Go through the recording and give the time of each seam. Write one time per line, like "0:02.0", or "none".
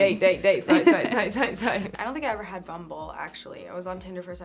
0:01.9

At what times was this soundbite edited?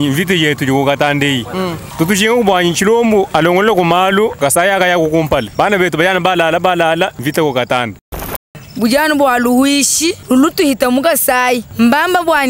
0:01.8
0:03.3
0:04.3
0:05.5
0:07.2
0:08.4
0:10.2
0:11.7

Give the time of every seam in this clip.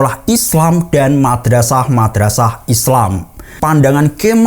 0:03.5

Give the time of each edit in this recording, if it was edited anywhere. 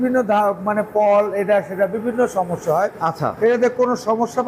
none

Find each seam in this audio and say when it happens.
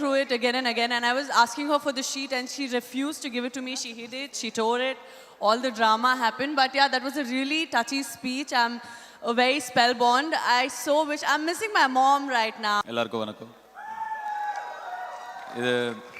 0:12.8

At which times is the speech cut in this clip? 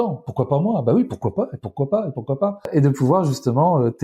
0:02.7

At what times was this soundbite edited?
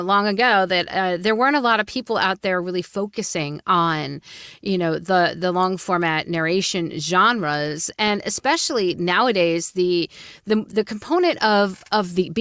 none

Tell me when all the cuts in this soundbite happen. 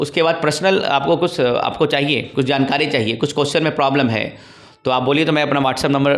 none

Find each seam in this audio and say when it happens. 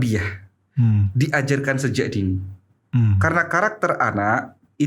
0:02.8

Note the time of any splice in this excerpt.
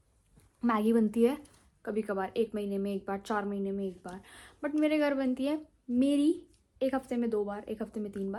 none

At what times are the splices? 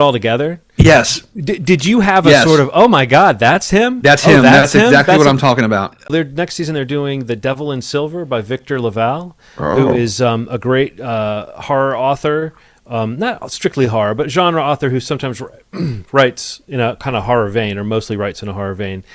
0:06.1

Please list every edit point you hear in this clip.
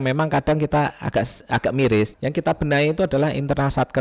0:02.1

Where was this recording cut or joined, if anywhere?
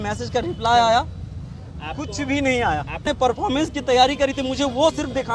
0:03.1

